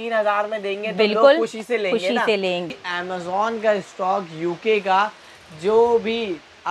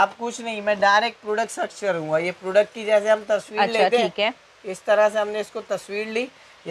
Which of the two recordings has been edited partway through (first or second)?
first